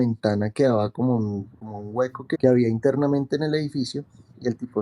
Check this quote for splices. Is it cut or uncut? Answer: cut